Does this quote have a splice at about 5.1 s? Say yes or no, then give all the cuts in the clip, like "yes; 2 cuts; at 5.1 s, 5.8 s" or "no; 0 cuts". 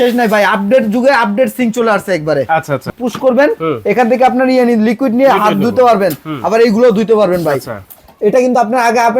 no; 2 cuts; at 2.9 s, 7.8 s